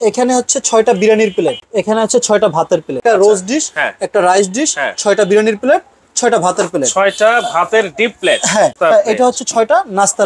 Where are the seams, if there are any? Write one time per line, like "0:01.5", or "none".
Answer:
0:01.6
0:03.0
0:08.8